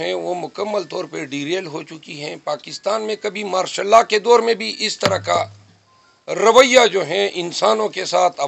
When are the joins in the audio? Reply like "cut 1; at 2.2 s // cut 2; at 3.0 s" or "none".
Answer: none